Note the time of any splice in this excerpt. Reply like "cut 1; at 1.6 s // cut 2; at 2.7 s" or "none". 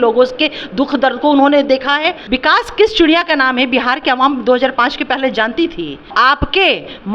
cut 1; at 2.2 s // cut 2; at 6.1 s